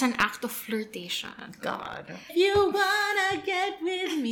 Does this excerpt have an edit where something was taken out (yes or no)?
yes